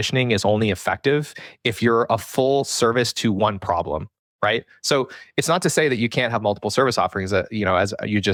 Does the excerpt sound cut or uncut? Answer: uncut